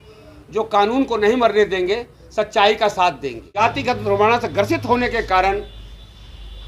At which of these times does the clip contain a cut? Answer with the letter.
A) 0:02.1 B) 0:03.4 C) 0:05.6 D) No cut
B